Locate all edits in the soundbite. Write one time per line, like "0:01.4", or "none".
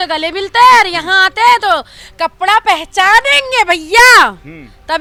none